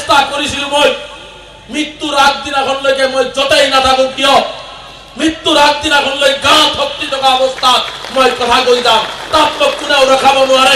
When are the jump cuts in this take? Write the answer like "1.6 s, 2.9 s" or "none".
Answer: none